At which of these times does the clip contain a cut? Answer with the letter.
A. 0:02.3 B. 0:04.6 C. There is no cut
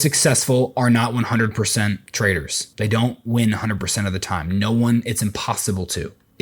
A